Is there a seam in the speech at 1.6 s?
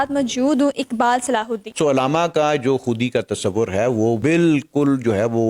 yes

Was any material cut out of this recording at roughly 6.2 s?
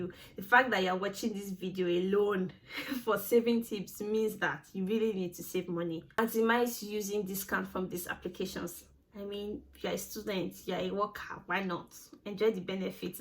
yes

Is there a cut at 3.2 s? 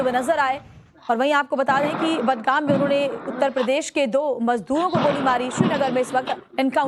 yes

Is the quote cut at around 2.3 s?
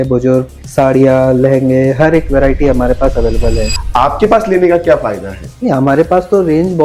no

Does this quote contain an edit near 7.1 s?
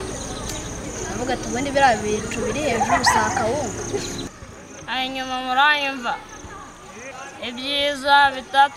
yes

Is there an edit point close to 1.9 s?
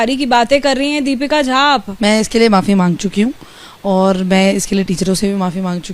yes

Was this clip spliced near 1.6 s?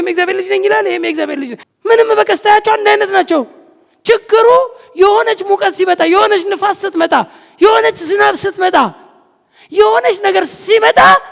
yes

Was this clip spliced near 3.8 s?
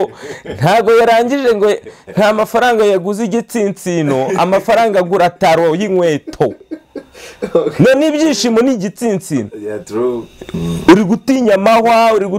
no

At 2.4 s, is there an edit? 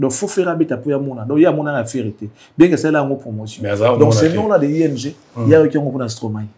no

